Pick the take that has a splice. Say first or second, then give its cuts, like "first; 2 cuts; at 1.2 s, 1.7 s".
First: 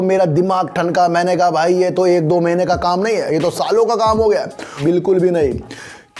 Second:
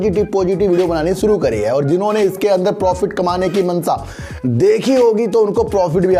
first; 1 cut; at 4.8 s